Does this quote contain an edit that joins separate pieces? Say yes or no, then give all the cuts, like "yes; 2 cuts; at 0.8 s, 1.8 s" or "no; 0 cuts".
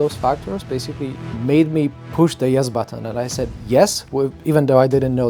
yes; 2 cuts; at 1.3 s, 2.0 s